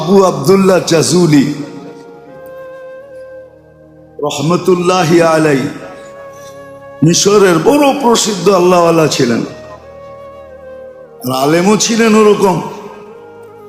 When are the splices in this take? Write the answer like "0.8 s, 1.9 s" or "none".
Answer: 1.9 s, 3.6 s, 9.5 s, 11.2 s